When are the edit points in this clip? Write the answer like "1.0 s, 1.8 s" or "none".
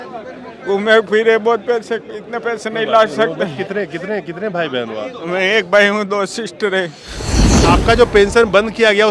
7.6 s